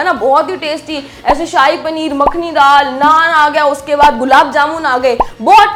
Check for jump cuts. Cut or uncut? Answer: uncut